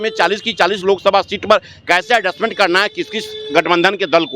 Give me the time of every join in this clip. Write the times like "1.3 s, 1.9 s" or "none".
none